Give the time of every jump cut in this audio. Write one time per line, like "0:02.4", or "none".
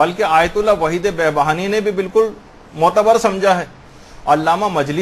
none